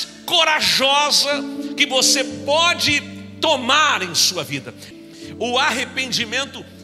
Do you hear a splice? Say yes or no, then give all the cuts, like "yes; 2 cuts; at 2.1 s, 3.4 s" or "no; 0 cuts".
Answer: yes; 1 cut; at 4.9 s